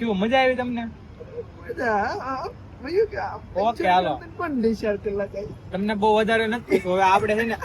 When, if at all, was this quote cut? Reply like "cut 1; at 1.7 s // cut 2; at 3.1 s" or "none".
none